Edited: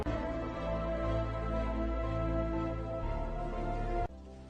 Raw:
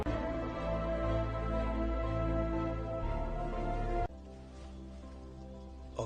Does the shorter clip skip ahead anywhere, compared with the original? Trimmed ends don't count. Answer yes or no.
no